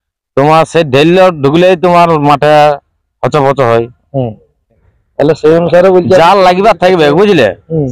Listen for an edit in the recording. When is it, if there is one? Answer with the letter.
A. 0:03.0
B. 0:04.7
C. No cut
B